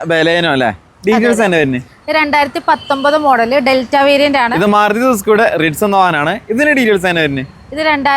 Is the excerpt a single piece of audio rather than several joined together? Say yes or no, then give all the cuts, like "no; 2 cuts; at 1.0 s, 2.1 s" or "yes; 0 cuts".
no; 1 cut; at 4.5 s